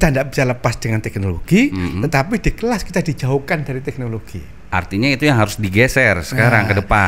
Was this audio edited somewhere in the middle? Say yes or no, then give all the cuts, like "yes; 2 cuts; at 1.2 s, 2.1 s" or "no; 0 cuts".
no; 0 cuts